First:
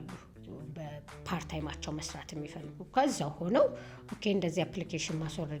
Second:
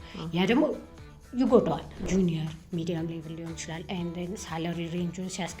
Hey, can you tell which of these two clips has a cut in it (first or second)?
second